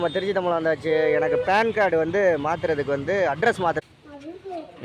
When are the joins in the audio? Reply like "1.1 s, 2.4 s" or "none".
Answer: 3.8 s